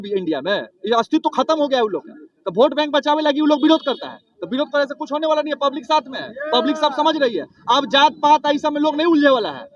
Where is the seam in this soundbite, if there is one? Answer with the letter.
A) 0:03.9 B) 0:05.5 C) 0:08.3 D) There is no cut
D